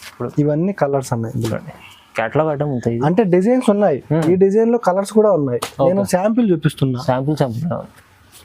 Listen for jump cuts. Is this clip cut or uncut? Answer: uncut